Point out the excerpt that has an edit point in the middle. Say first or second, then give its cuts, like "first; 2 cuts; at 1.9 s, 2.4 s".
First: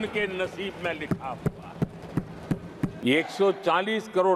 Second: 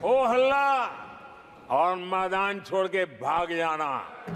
first; 1 cut; at 3.0 s